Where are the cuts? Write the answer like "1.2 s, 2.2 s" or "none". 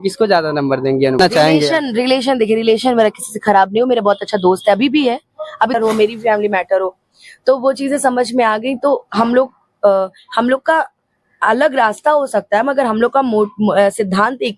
1.2 s, 5.7 s